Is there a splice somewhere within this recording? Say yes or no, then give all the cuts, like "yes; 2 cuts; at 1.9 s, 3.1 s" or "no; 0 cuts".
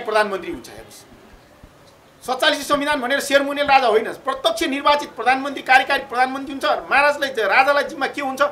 no; 0 cuts